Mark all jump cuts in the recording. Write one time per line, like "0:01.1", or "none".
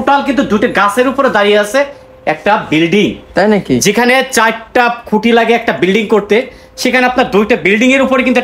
none